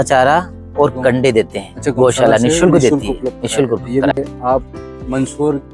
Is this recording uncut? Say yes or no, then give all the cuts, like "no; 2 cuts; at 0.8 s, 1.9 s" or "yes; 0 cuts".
no; 1 cut; at 4.1 s